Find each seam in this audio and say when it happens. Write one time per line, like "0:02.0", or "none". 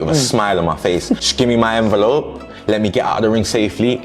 0:01.3